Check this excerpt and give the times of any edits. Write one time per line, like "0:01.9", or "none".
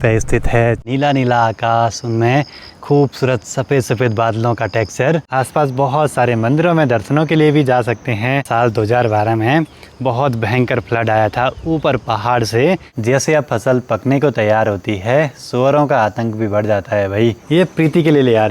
0:00.8
0:05.3
0:08.4
0:12.9
0:17.4